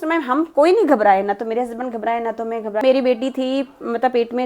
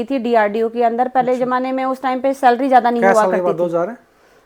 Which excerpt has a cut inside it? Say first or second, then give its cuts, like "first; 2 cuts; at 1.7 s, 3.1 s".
first; 1 cut; at 2.8 s